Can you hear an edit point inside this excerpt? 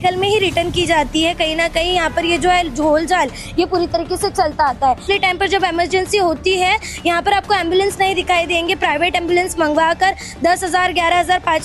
yes; 1 cut; at 5.0 s

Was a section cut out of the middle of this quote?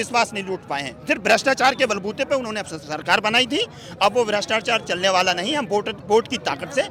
no; 0 cuts

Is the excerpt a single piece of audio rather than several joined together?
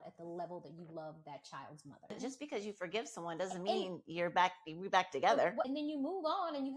no; 2 cuts; at 2.1 s, 5.7 s

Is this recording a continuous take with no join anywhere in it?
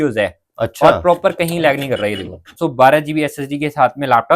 no; 1 cut; at 2.5 s

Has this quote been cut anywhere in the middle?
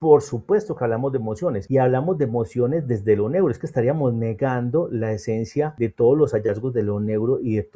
yes; 2 cuts; at 1.6 s, 5.7 s

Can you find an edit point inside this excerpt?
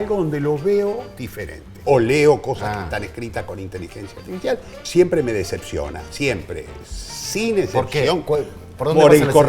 yes; 2 cuts; at 1.8 s, 4.7 s

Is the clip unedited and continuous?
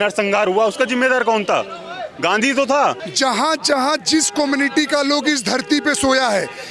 no; 1 cut; at 3.0 s

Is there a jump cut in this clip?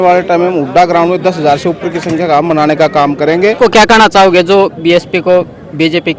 yes; 1 cut; at 3.6 s

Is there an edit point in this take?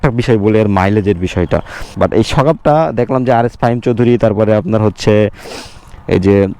yes; 1 cut; at 1.8 s

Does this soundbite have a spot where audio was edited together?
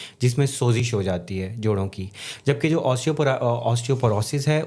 no; 0 cuts

